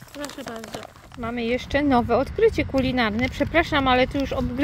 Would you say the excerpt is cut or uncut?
cut